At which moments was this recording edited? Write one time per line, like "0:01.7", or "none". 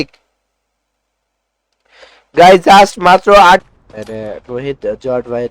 0:03.7